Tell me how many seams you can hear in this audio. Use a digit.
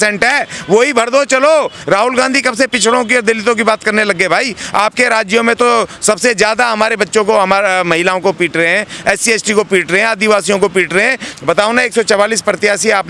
2